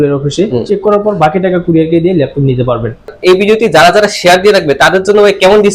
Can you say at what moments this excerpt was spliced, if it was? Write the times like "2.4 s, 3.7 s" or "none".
3.1 s